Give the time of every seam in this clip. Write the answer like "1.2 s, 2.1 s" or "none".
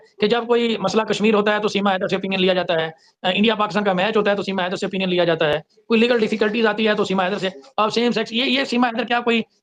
none